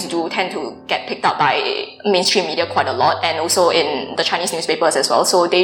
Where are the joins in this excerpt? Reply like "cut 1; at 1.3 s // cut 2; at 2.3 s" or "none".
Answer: none